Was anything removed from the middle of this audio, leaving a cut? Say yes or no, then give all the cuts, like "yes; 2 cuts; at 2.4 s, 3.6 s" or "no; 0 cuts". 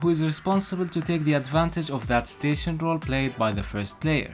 no; 0 cuts